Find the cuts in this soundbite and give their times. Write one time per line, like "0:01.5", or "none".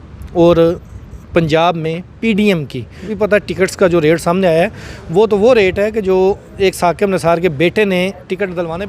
0:03.0